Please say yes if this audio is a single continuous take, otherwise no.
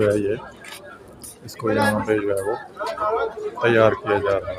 yes